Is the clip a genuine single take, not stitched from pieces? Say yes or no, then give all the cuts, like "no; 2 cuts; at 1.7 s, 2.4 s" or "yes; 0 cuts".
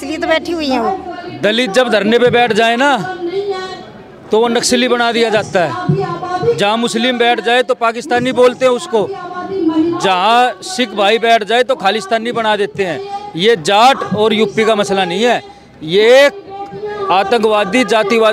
no; 1 cut; at 1.1 s